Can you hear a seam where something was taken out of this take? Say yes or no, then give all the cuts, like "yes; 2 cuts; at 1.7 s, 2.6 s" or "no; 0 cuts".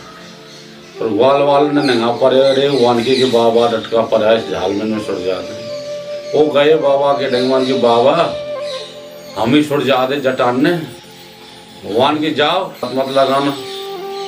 yes; 1 cut; at 12.9 s